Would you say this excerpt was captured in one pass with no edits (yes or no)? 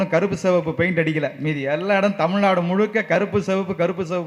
yes